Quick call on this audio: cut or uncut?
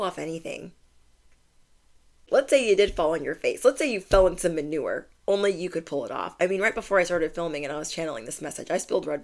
cut